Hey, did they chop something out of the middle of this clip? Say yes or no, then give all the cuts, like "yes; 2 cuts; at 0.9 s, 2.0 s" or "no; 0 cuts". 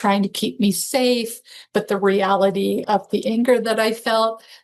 yes; 1 cut; at 2.8 s